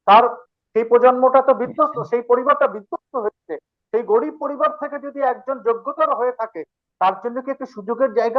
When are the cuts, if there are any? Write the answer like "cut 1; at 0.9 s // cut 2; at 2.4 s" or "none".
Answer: none